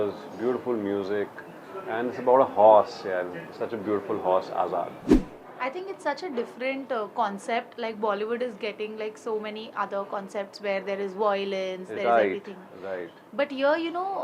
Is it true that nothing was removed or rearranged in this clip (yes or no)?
yes